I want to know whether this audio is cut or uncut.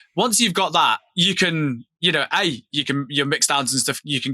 cut